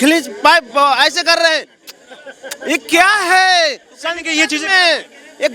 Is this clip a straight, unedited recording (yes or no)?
yes